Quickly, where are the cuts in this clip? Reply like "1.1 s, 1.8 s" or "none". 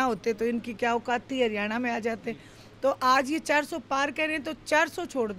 none